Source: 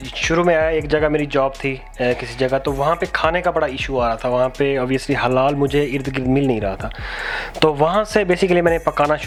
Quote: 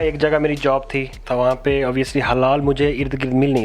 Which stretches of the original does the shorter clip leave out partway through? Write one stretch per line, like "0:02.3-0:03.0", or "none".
0:01.9-0:04.2